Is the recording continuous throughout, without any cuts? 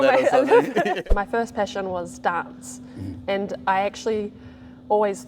no; 1 cut; at 1.0 s

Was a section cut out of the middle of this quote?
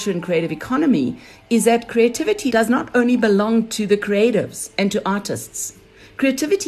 yes; 1 cut; at 2.4 s

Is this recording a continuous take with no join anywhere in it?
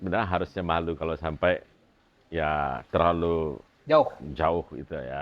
yes; 0 cuts

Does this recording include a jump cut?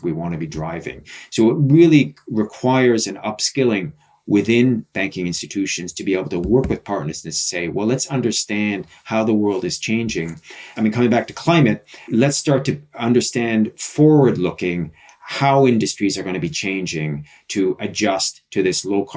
yes; 2 cuts; at 10.6 s, 12.1 s

